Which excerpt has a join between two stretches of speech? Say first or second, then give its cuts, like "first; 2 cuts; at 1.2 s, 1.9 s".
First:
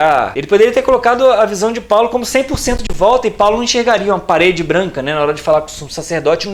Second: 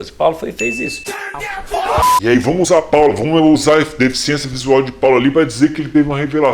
second; 1 cut; at 2.2 s